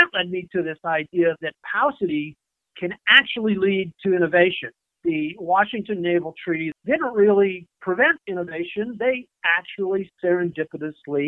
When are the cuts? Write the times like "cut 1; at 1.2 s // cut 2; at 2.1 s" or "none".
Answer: cut 1; at 5.0 s // cut 2; at 6.7 s